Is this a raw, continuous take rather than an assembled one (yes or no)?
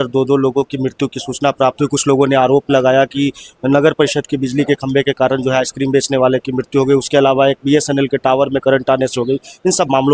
yes